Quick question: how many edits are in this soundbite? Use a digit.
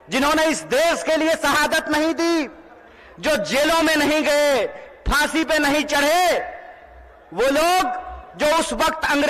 0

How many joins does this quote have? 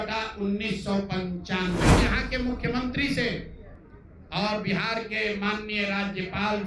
1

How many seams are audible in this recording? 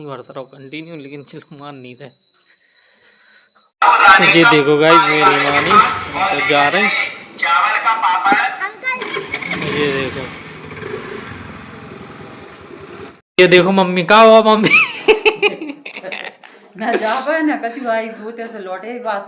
2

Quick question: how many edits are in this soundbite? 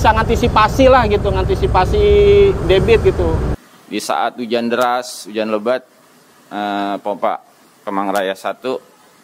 1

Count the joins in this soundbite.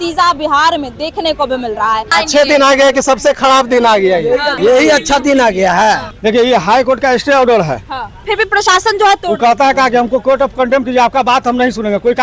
4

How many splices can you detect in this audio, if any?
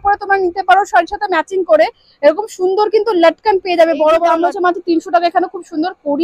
1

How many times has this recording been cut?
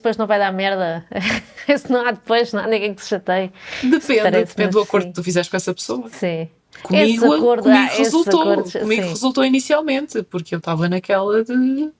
0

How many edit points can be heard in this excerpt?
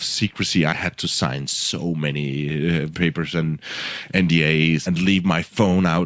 3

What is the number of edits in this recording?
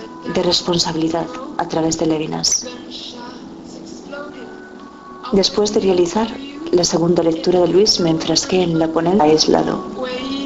0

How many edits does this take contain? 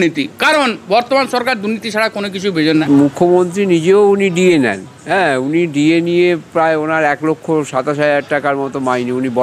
1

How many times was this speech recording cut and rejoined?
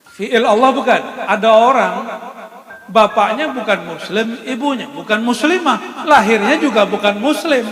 1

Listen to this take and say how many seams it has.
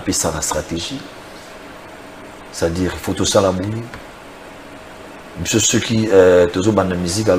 0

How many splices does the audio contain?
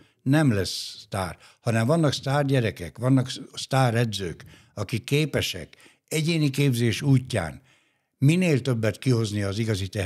0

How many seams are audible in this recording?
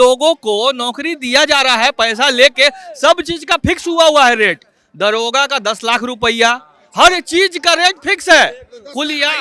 0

